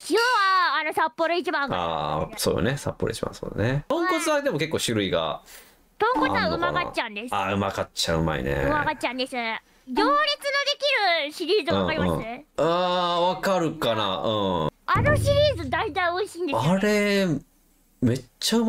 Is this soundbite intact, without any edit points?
no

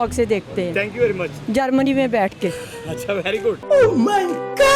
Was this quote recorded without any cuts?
no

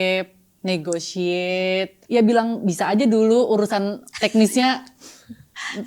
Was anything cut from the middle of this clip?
yes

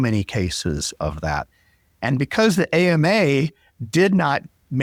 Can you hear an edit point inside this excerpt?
no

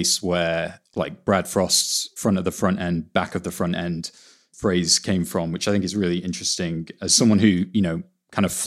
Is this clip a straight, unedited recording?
no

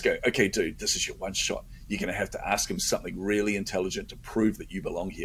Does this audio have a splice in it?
no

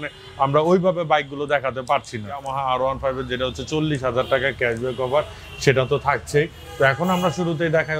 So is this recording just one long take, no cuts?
no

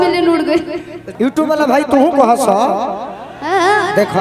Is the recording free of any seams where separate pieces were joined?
no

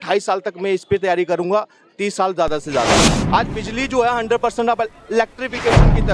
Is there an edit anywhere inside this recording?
yes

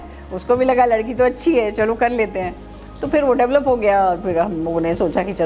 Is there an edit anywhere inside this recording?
no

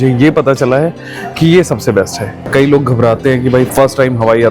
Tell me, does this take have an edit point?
yes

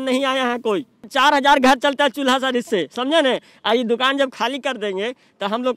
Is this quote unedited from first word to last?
no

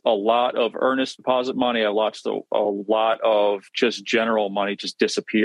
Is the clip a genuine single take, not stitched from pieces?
no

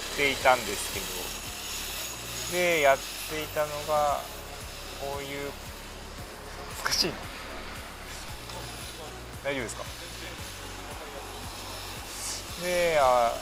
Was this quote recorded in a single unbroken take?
yes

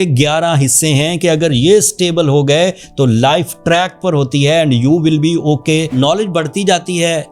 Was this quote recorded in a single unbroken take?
no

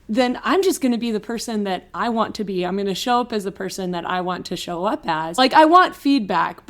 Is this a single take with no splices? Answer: no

